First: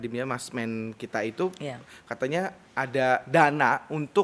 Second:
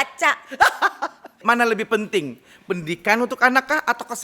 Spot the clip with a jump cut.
second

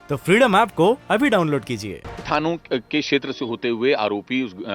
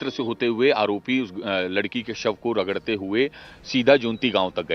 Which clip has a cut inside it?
first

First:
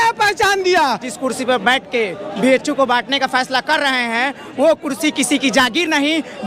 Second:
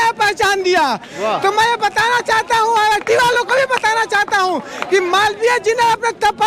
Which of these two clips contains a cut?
first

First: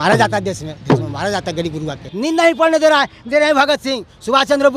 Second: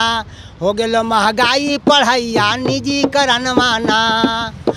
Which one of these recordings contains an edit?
first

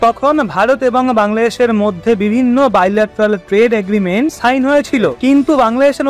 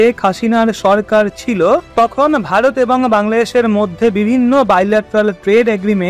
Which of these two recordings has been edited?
first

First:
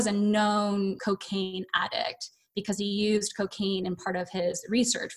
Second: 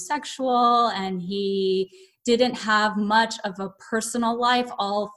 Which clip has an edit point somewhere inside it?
first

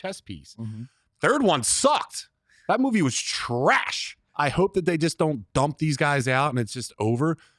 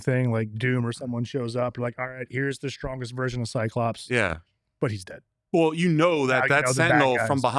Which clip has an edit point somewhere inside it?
first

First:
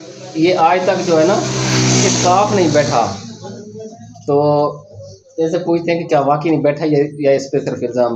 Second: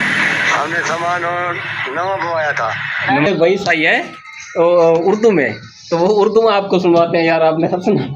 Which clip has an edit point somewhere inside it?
second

